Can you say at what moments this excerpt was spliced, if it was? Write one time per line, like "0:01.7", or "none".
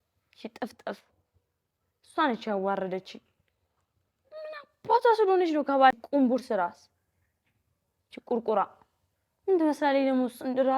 0:05.9